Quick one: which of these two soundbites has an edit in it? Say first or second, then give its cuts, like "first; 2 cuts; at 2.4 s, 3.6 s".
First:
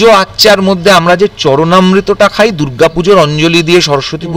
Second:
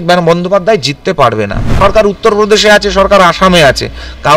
second; 1 cut; at 1.7 s